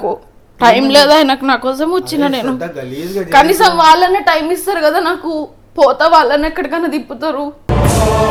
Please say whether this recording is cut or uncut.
uncut